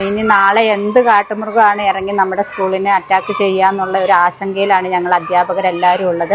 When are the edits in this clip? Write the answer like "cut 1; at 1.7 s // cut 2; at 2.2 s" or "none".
none